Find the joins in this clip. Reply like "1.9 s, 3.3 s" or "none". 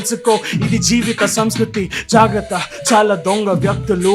none